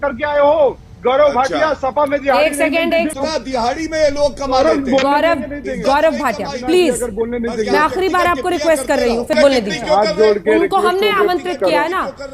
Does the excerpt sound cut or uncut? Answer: cut